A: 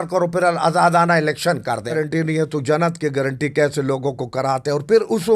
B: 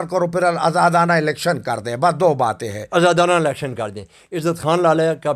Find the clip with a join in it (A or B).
A